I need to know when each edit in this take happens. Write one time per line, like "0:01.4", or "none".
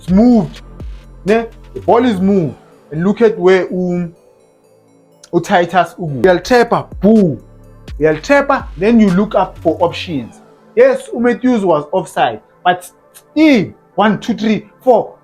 0:06.2